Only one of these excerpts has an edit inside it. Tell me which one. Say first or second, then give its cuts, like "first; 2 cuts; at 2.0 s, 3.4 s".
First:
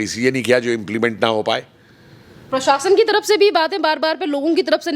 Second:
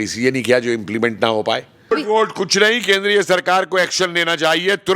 second; 1 cut; at 1.9 s